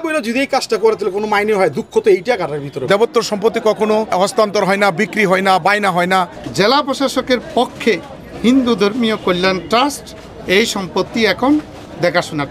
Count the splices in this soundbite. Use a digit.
3